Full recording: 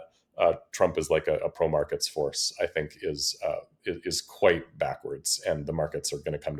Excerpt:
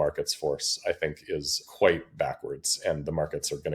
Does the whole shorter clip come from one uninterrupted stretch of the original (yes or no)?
no